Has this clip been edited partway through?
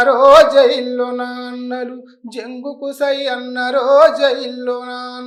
no; 0 cuts

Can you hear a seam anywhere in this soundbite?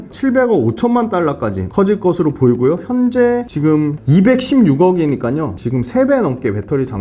no; 0 cuts

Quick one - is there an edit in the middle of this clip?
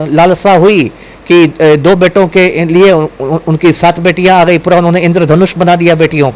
no; 0 cuts

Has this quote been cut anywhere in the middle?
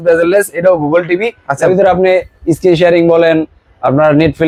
no; 0 cuts

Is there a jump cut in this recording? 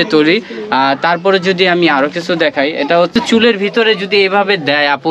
yes; 1 cut; at 3.1 s

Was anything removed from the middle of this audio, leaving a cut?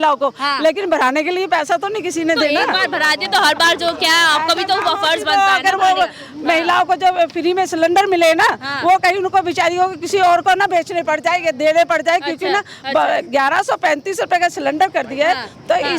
no; 0 cuts

